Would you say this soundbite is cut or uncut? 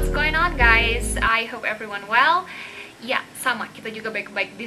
uncut